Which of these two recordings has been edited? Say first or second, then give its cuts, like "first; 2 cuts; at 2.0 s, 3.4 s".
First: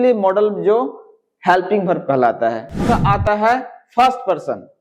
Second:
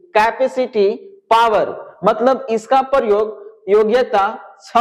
first; 1 cut; at 2.8 s